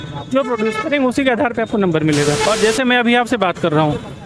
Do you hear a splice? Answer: yes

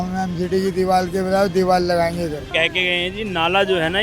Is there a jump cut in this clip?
yes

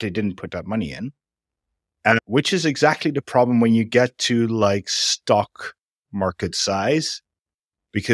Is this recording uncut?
no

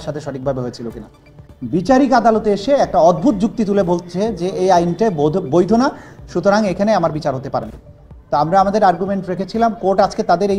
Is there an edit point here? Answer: yes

